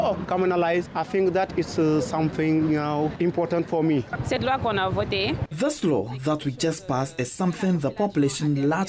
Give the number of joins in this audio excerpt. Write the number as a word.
three